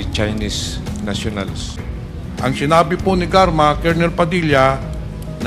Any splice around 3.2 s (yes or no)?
no